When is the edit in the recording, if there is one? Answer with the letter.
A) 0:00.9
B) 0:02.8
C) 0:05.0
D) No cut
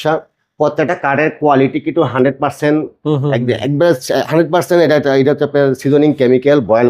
D